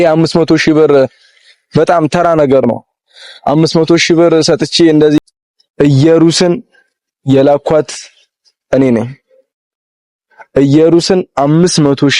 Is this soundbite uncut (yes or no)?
no